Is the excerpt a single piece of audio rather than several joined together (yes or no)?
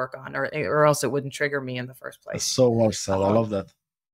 yes